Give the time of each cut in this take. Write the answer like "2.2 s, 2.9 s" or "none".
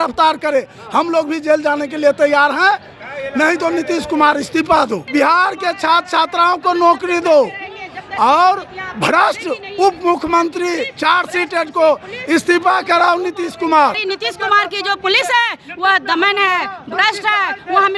5.0 s, 14.0 s